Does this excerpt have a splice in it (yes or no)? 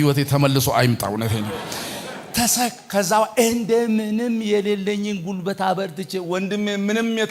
no